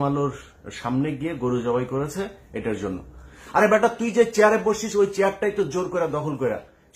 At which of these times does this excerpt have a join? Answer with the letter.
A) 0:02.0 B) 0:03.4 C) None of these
B